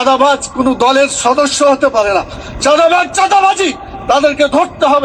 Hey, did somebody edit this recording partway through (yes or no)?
no